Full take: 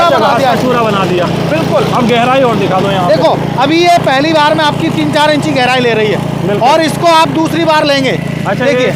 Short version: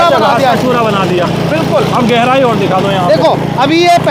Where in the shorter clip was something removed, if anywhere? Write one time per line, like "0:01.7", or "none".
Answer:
none